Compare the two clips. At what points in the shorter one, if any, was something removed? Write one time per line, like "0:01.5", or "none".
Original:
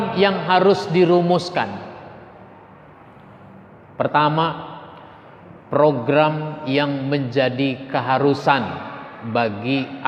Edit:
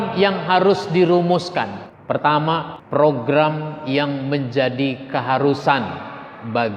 0:01.9
0:02.8